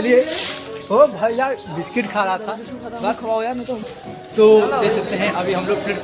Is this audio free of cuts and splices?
no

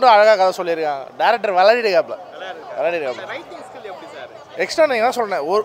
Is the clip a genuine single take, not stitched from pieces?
yes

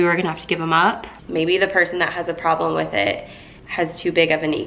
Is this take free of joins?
no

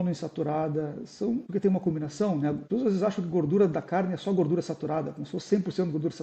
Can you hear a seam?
yes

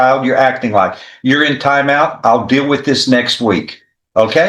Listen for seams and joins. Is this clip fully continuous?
yes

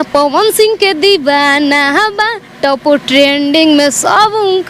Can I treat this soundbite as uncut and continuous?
yes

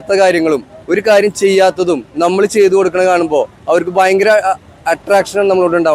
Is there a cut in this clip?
no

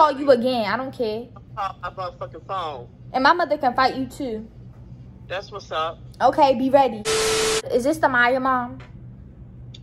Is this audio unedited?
yes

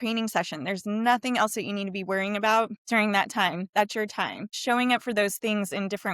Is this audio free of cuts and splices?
no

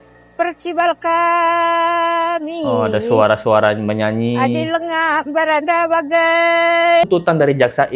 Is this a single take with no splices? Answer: no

